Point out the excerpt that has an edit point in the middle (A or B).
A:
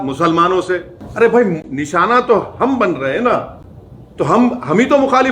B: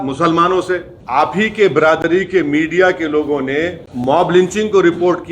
B